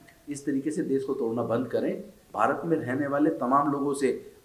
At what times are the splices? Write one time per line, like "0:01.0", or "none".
0:02.2